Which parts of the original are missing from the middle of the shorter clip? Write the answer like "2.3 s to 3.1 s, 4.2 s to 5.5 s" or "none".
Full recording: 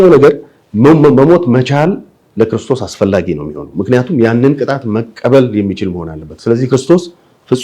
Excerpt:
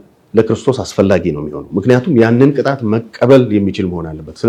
none